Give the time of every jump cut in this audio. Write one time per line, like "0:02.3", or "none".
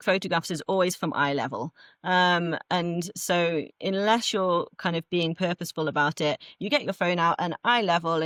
none